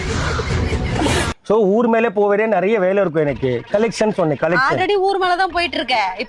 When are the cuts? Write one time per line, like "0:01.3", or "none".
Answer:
0:01.3